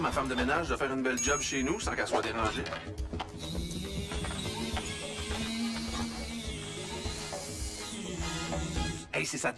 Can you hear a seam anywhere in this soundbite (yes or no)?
yes